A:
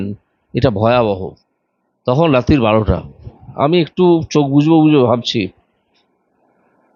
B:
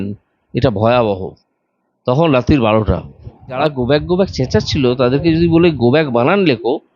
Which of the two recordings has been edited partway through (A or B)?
B